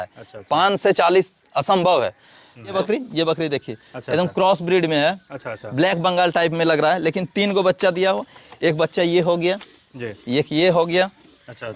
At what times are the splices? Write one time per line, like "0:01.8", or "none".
0:02.7